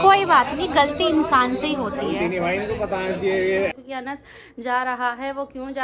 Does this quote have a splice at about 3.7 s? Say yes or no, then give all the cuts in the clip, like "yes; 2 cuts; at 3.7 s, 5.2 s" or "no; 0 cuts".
yes; 1 cut; at 3.7 s